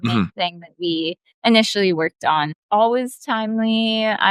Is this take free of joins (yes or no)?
no